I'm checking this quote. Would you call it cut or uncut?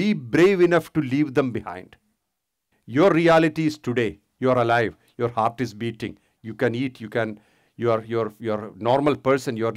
uncut